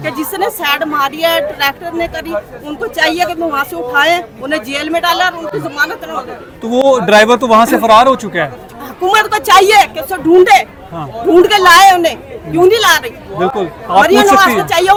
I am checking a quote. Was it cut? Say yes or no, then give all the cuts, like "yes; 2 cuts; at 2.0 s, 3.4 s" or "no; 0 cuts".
no; 0 cuts